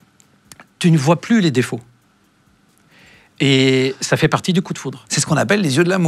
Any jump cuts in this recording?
no; 0 cuts

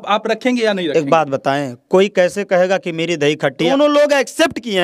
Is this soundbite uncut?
no; 1 cut; at 3.7 s

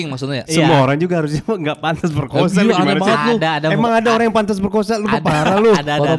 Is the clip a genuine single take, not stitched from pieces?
yes; 0 cuts

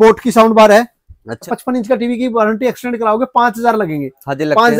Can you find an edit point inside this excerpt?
yes; 1 cut; at 1.5 s

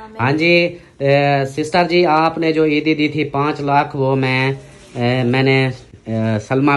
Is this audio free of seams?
yes; 0 cuts

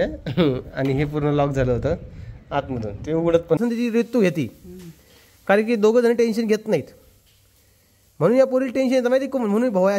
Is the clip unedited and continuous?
no; 1 cut; at 3.6 s

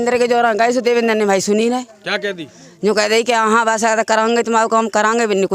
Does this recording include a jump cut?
no; 0 cuts

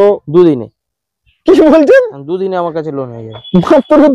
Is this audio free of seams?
yes; 0 cuts

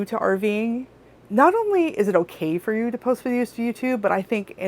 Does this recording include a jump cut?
yes; 1 cut; at 1.2 s

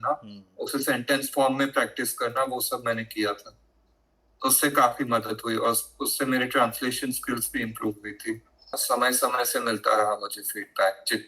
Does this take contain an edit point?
yes; 1 cut; at 8.8 s

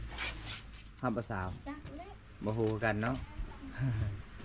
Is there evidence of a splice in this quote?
no; 0 cuts

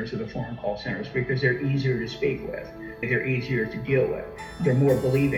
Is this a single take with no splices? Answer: yes; 0 cuts

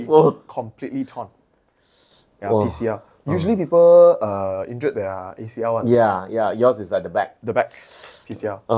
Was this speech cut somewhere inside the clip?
no; 0 cuts

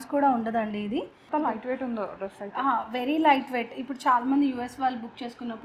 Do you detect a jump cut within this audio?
yes; 1 cut; at 1.2 s

